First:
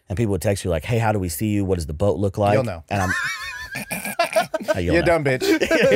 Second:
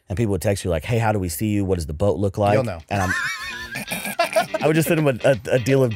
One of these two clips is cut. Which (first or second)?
second